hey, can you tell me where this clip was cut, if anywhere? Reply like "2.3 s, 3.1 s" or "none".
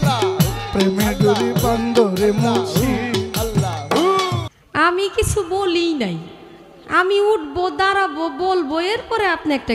4.4 s